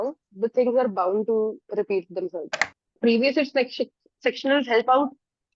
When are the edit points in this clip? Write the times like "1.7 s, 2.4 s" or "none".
2.9 s